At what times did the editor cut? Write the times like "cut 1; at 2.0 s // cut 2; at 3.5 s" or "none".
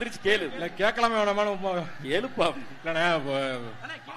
none